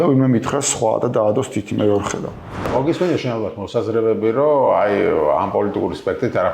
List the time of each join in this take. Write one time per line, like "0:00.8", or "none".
0:02.7